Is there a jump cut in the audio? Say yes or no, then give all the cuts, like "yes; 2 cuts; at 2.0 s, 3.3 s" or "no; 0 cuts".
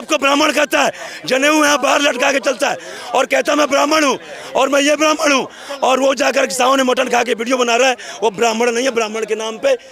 no; 0 cuts